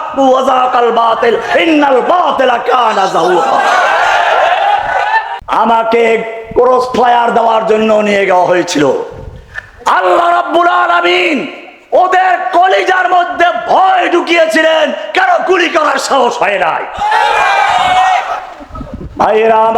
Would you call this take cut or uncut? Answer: cut